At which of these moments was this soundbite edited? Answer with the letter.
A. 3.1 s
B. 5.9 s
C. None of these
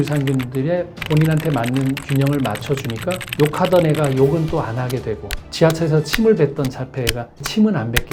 C